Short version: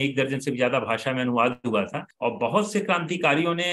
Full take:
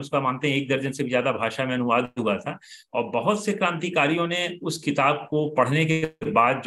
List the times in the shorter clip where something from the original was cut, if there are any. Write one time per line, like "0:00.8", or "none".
0:02.0